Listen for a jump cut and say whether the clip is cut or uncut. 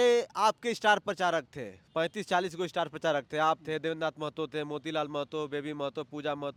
uncut